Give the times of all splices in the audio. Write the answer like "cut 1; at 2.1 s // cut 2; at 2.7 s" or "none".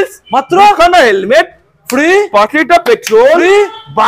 none